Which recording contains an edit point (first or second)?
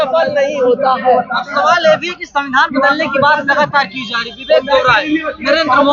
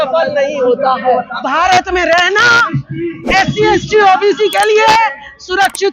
second